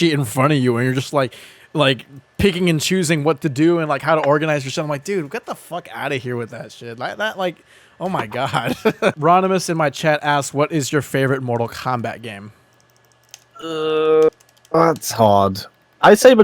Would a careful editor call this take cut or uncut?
cut